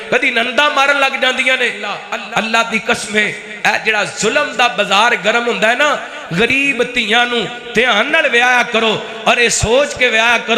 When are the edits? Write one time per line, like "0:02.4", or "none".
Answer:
0:02.1